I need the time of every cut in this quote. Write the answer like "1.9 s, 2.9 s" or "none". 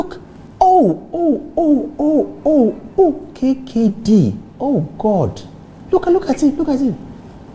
none

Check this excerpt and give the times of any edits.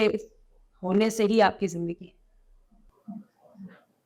none

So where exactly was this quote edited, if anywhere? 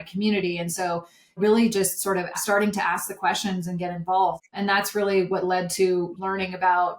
1.4 s, 2.4 s, 4.4 s, 6.1 s

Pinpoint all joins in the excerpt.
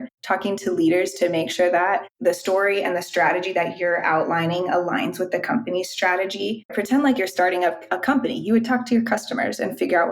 6.7 s

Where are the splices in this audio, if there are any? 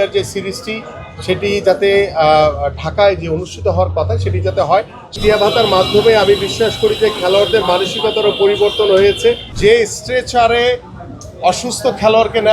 5.2 s, 9.5 s

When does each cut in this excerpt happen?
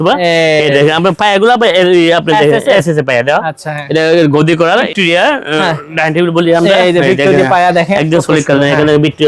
4.9 s, 7.9 s

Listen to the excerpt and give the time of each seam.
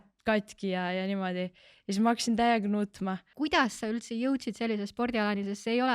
3.3 s

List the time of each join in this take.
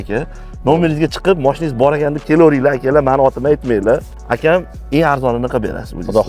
4.2 s

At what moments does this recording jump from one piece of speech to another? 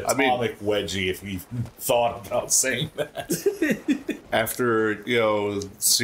4.2 s

